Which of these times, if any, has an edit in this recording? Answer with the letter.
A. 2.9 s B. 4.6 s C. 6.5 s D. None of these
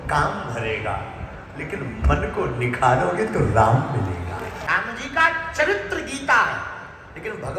B